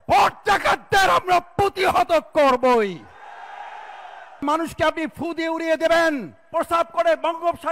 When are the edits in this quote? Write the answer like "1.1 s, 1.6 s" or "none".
4.4 s, 6.4 s